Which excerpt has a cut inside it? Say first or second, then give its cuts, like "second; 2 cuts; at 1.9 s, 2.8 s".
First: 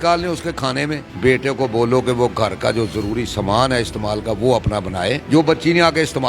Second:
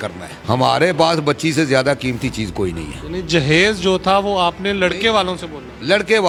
first; 2 cuts; at 1.0 s, 5.2 s